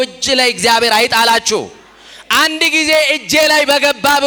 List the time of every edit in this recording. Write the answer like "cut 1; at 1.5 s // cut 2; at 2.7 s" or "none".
none